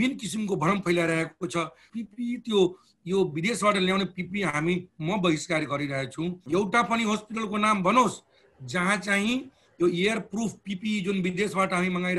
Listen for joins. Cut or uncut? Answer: cut